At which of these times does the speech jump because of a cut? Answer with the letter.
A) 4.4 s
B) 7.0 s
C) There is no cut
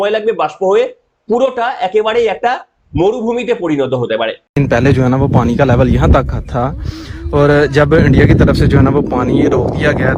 A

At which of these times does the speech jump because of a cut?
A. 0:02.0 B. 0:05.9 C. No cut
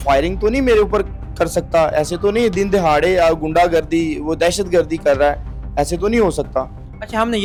C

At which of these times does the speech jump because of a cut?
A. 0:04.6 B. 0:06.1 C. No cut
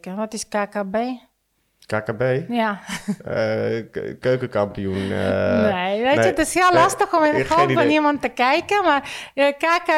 C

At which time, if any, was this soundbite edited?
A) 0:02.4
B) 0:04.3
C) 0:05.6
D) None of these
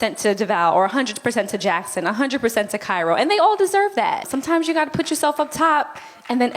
B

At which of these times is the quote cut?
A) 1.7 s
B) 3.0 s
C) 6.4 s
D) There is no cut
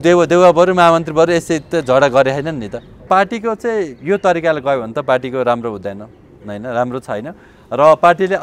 B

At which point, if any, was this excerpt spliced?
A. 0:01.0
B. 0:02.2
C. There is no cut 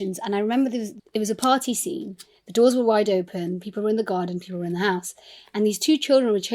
A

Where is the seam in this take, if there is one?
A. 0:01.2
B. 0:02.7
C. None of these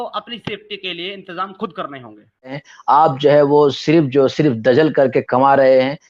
B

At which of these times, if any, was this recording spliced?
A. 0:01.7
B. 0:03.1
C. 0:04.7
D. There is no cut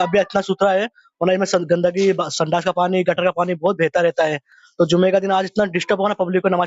D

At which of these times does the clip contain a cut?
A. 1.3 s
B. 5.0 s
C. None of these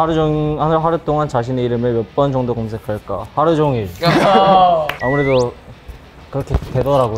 B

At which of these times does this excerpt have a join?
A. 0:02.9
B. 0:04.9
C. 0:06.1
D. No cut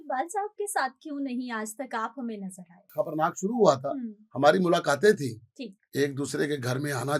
A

